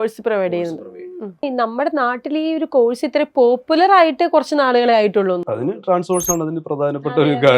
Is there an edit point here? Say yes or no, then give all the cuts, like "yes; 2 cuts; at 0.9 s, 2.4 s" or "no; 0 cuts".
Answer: yes; 1 cut; at 1.4 s